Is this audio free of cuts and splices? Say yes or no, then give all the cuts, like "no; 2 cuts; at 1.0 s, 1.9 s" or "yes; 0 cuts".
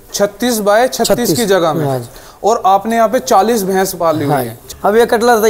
no; 1 cut; at 4.6 s